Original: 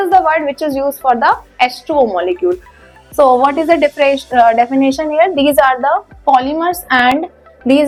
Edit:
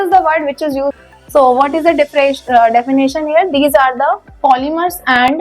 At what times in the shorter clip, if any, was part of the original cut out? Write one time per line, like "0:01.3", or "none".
0:01.0